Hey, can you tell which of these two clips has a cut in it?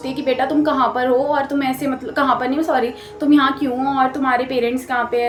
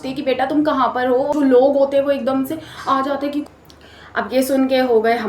second; 2 cuts; at 1.3 s, 3.5 s

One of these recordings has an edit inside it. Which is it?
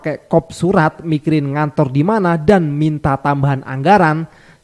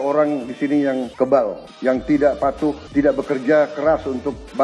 second; 3 cuts; at 1.1 s, 1.7 s, 2.8 s

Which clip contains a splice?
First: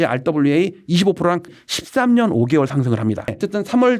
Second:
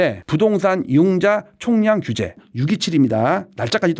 first; 1 cut; at 1.6 s

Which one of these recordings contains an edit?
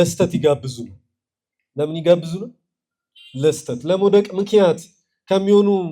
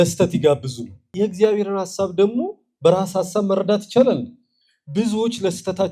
second; 1 cut; at 1.1 s

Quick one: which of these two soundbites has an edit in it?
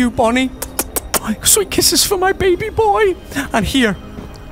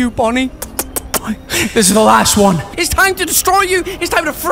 second; 2 cuts; at 1.4 s, 2.7 s

